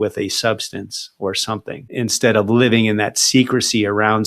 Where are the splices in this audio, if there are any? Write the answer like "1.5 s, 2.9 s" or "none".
1.9 s

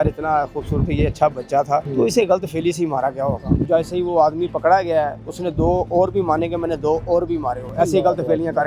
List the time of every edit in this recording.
1.9 s, 3.7 s, 7.7 s

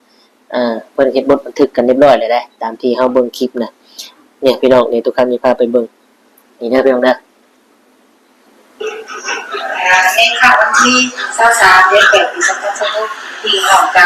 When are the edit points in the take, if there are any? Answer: none

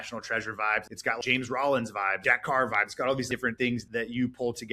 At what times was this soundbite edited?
1.1 s, 2.2 s, 3.7 s

